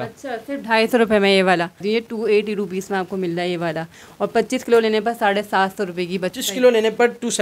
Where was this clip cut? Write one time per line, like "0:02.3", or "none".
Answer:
0:01.8
0:06.3